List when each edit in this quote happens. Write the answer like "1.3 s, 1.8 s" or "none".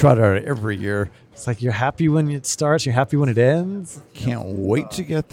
1.2 s, 4.0 s